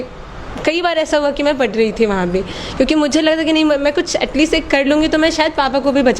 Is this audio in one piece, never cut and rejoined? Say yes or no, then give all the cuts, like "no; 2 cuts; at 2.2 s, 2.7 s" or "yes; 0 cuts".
yes; 0 cuts